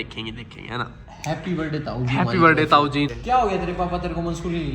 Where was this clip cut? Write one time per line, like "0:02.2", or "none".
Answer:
0:03.2